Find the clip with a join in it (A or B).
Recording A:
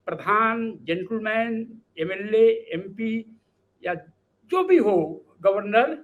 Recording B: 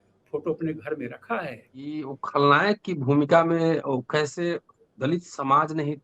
B